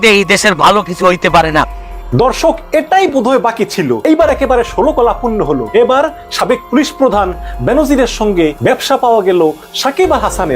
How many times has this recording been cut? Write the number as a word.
four